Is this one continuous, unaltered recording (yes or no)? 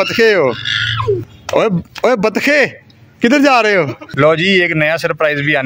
no